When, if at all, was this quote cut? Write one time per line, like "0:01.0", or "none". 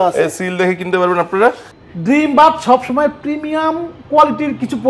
0:01.7

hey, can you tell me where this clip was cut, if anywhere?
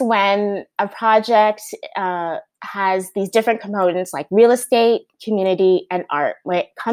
none

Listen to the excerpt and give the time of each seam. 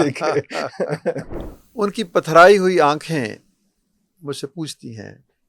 0:01.4

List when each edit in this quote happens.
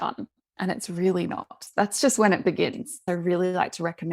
0:01.6
0:03.0

